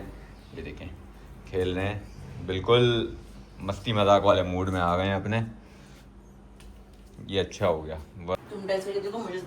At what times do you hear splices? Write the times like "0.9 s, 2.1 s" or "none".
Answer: 8.4 s